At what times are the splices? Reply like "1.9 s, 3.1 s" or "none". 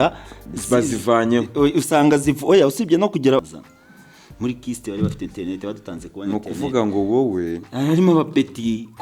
3.4 s